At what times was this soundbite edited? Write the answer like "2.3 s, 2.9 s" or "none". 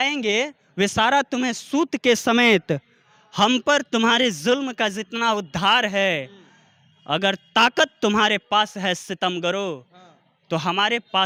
none